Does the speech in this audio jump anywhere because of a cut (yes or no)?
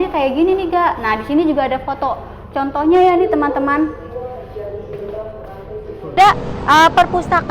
yes